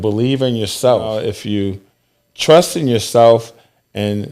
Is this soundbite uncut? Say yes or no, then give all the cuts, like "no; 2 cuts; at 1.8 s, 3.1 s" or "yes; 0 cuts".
no; 1 cut; at 1.2 s